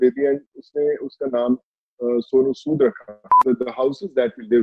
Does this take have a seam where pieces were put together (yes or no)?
yes